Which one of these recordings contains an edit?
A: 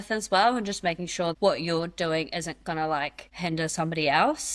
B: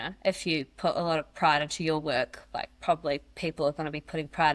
A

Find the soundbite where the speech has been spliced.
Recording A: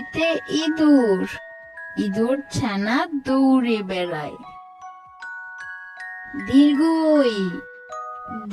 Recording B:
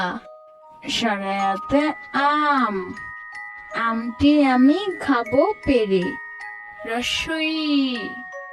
A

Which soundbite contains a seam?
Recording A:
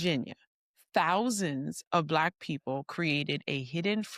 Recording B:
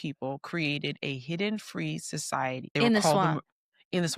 B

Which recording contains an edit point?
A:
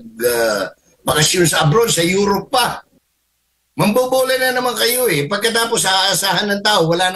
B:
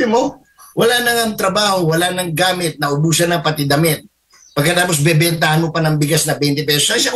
A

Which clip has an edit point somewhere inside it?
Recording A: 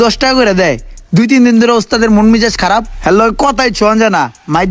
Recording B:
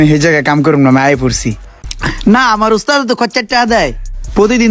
B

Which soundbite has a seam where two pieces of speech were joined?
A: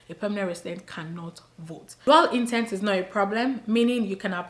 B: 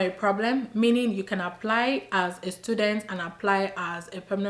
A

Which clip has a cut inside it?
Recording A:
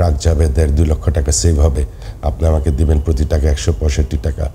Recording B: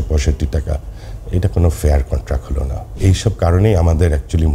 B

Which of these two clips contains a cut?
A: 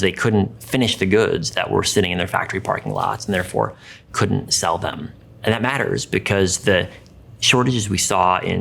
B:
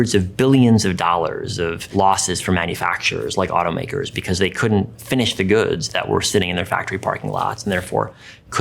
B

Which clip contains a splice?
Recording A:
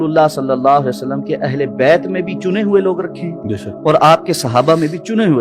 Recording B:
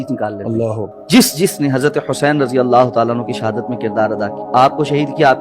B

